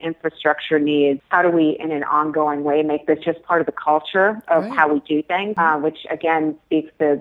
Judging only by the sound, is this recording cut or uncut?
cut